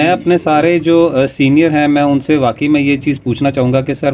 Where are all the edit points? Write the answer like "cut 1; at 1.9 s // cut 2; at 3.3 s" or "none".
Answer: none